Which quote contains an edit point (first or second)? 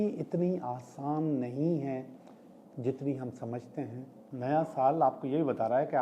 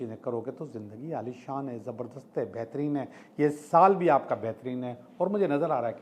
first